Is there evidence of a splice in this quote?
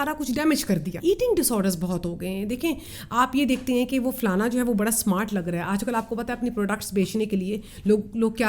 yes; 1 cut; at 0.9 s

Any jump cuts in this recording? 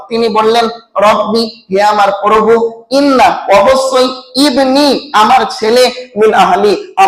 no; 0 cuts

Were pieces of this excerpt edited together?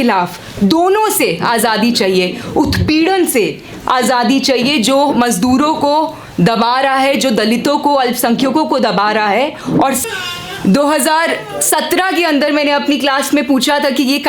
yes; 1 cut; at 10.0 s

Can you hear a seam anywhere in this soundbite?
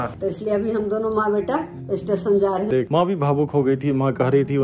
yes; 1 cut; at 2.7 s

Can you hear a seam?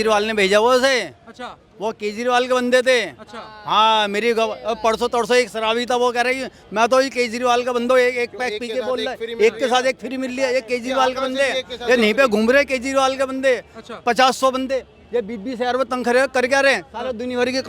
no; 0 cuts

